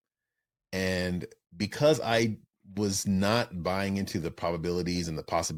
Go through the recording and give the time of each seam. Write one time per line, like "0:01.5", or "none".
none

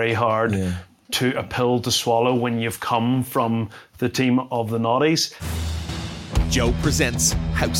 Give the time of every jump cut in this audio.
0:05.4

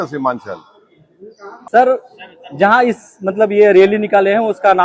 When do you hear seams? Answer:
0:01.5

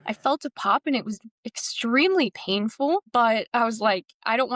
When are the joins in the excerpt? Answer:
none

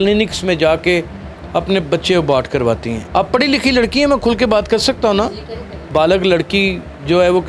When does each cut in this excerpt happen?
0:02.9
0:05.8

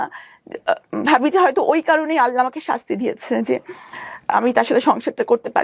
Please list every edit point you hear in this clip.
none

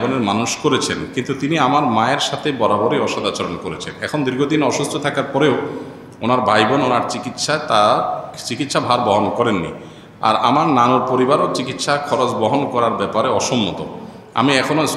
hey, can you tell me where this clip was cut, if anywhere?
none

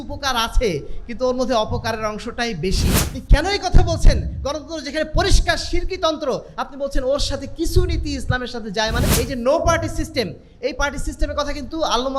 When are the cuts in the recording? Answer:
0:03.3
0:09.1

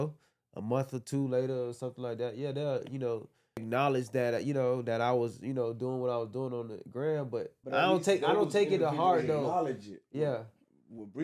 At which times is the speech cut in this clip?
0:03.6
0:07.6

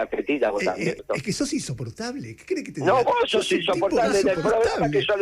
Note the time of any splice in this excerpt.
0:01.0

